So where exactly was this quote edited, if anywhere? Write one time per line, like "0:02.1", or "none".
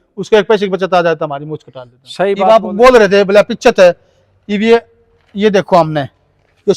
0:02.4